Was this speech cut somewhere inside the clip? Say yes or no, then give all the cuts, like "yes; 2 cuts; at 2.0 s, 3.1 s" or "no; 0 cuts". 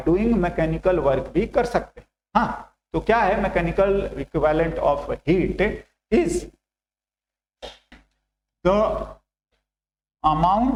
no; 0 cuts